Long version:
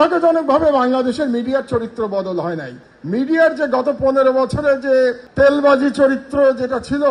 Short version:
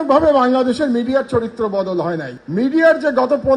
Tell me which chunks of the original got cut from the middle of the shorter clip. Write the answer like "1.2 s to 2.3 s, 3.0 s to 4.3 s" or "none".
2.7 s to 2.9 s